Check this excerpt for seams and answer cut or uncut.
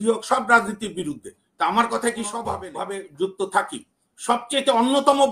cut